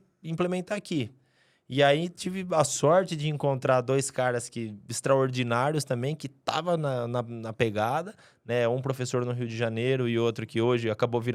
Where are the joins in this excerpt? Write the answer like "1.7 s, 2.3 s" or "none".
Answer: none